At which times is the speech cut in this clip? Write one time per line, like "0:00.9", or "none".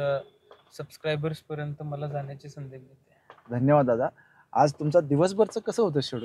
none